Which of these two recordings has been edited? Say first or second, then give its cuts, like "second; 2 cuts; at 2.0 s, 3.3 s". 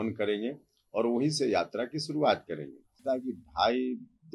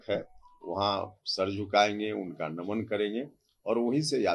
first; 1 cut; at 3.0 s